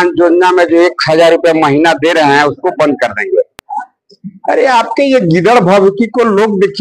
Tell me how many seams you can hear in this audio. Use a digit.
0